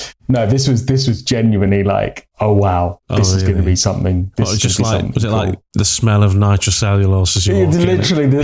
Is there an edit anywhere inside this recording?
yes; 1 cut; at 2.2 s

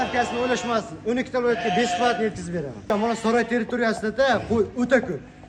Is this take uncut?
no; 1 cut; at 2.9 s

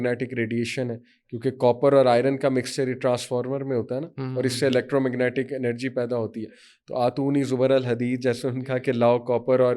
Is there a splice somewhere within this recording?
no; 0 cuts

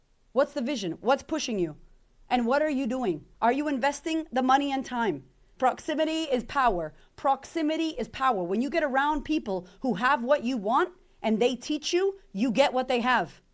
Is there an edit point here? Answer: yes; 1 cut; at 5.5 s

